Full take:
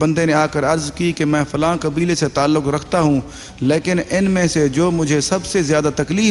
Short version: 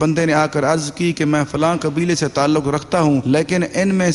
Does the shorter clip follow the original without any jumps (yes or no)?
no